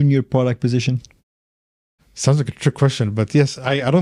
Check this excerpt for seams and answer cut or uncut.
uncut